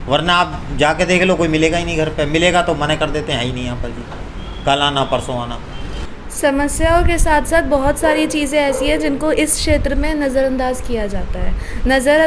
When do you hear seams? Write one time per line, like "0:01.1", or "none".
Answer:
0:06.0